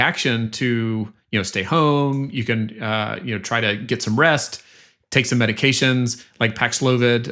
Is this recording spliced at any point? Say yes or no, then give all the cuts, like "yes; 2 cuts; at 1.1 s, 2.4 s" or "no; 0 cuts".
no; 0 cuts